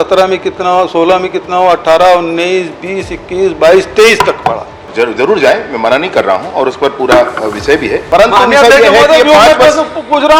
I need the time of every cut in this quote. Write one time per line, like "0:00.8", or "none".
0:04.8
0:08.0